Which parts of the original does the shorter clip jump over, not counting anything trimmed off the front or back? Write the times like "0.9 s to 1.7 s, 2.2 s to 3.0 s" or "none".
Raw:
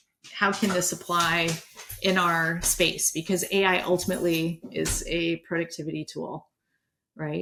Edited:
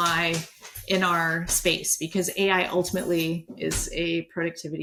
none